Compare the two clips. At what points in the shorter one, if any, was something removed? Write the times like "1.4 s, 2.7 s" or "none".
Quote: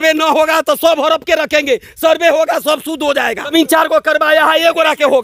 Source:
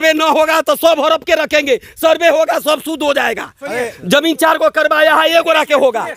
3.5 s